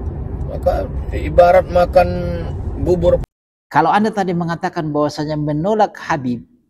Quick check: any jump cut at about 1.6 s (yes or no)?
no